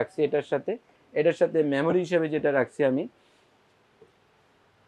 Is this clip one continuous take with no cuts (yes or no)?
yes